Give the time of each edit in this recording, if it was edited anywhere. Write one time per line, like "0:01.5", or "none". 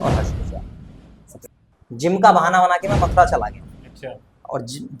0:01.5